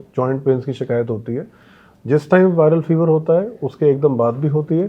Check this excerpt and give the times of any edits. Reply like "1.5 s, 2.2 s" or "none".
none